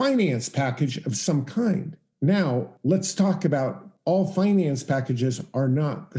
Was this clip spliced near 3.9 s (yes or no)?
yes